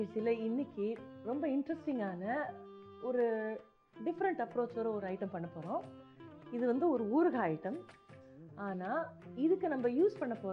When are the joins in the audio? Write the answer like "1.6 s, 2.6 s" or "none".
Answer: none